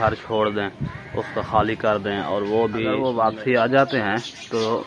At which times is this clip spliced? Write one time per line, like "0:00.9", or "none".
0:03.0